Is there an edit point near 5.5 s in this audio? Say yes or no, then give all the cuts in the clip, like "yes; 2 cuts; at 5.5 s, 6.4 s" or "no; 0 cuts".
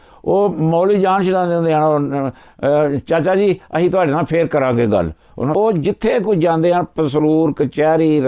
yes; 1 cut; at 5.5 s